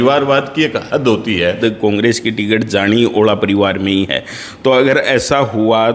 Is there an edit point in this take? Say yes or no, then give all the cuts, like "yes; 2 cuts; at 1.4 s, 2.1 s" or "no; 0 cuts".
yes; 1 cut; at 1.6 s